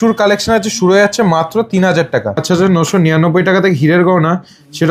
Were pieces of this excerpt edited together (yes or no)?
yes